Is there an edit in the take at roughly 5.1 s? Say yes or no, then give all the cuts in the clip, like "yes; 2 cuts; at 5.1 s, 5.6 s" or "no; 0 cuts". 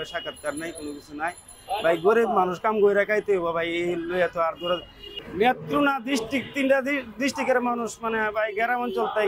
yes; 1 cut; at 5.1 s